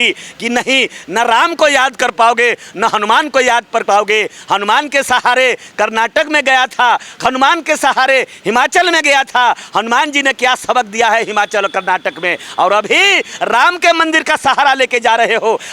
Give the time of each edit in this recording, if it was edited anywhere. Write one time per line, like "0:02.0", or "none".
none

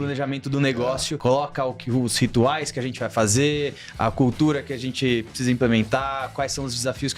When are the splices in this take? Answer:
0:01.1

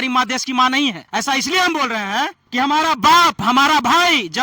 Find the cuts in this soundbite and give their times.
0:01.0
0:02.4

